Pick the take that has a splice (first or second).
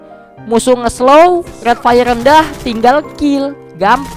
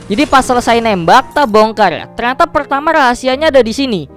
second